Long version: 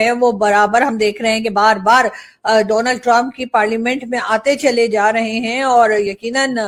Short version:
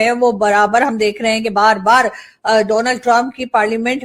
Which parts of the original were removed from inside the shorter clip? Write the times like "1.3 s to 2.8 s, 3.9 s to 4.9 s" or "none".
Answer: none

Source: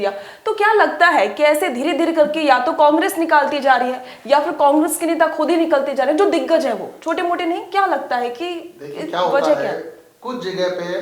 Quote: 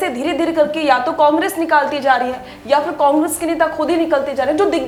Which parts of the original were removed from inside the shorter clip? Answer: none

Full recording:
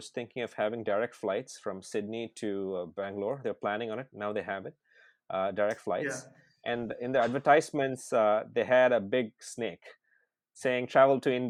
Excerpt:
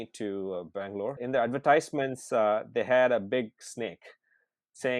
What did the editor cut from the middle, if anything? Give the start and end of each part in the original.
3.4 s to 7.0 s

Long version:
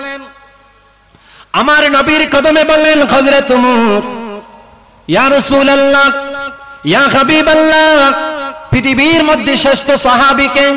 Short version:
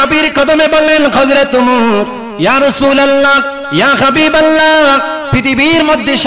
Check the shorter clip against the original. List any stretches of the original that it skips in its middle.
4.2 s to 4.9 s, 6.3 s to 6.7 s, 8.3 s to 8.6 s

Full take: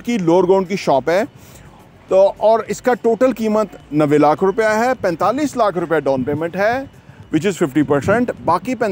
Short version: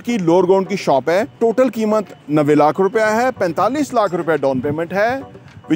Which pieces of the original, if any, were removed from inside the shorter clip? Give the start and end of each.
1.4 s to 3.0 s

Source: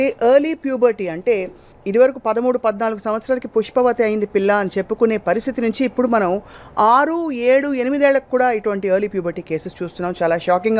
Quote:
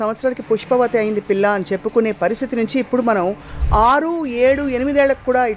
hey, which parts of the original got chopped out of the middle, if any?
none

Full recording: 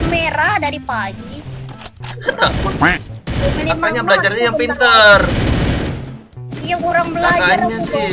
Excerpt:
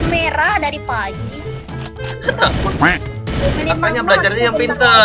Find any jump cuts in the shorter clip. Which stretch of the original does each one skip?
none

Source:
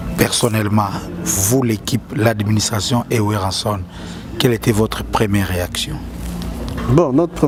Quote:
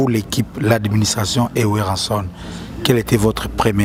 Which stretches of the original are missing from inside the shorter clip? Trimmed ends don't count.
none

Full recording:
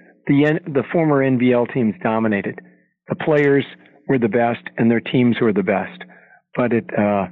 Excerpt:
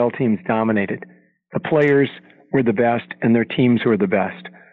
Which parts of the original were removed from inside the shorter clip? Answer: none

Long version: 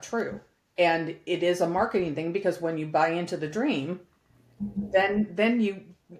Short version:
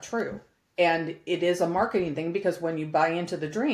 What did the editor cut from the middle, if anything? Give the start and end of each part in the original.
none

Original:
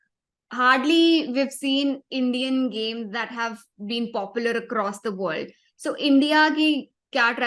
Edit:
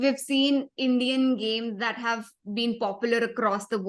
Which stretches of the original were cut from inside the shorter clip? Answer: none

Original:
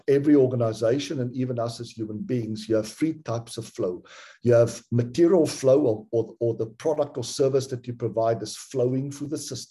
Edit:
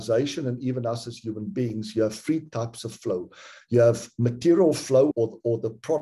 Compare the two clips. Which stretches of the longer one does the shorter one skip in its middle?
5.8 s to 6.1 s

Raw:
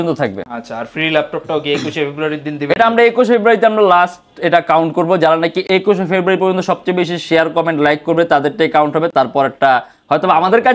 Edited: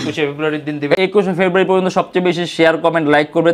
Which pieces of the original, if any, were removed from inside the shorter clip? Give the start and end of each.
2.8 s to 5.7 s

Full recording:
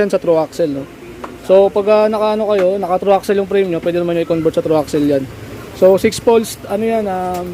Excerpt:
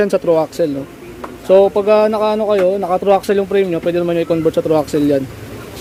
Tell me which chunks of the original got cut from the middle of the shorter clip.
none

